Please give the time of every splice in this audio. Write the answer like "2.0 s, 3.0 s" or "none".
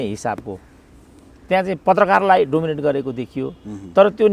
none